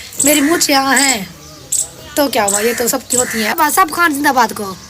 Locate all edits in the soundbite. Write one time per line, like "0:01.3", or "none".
0:03.6